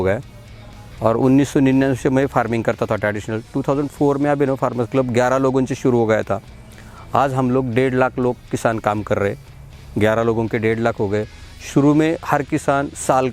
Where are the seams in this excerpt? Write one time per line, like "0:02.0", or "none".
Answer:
none